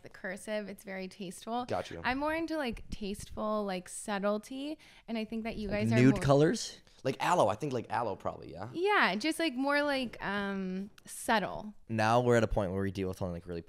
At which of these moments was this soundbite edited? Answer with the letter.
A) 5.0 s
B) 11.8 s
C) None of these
B